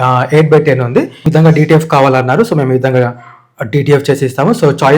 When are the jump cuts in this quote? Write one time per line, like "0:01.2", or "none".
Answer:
0:01.2